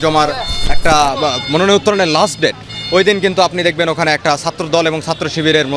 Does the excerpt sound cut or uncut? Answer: uncut